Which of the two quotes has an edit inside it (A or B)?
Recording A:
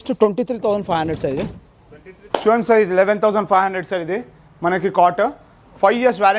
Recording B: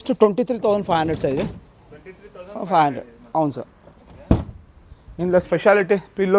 A